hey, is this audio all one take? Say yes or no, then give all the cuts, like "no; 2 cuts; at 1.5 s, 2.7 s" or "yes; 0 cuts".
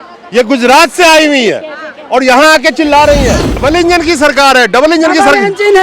no; 1 cut; at 3.5 s